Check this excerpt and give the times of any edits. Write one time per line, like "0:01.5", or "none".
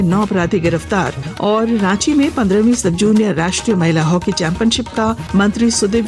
0:01.2
0:05.2